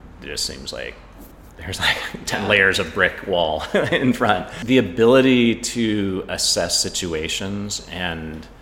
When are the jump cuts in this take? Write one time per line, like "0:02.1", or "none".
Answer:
0:04.5